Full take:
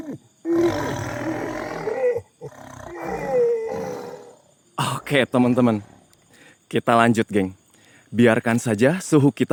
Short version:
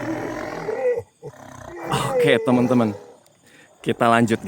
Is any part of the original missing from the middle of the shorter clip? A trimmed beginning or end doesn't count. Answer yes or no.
yes